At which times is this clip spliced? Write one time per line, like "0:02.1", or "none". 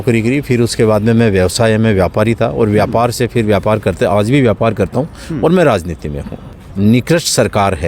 0:06.5